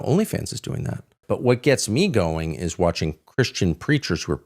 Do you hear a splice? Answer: yes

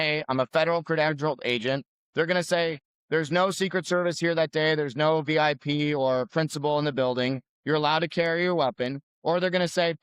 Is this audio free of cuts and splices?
no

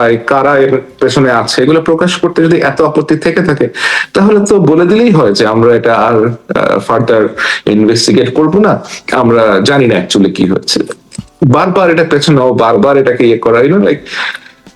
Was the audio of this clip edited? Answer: no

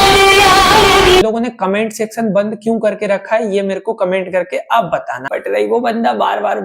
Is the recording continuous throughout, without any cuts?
no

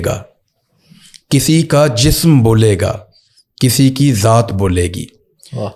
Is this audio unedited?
yes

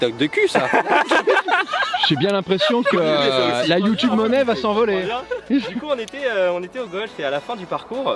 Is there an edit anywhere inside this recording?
no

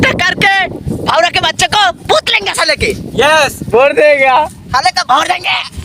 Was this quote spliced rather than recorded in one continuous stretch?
no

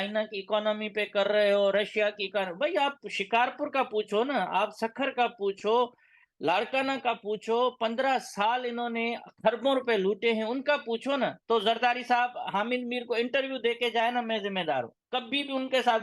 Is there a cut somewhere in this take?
no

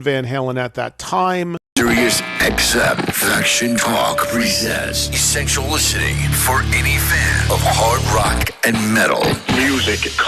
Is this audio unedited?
no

